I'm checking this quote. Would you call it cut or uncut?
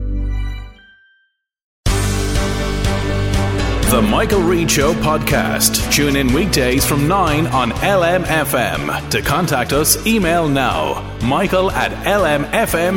cut